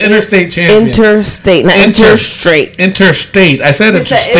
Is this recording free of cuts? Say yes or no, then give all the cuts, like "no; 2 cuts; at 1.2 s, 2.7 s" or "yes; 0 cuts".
yes; 0 cuts